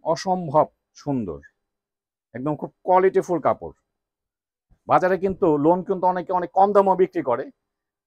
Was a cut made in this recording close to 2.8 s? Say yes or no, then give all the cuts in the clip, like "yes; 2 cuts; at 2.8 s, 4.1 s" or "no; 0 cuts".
no; 0 cuts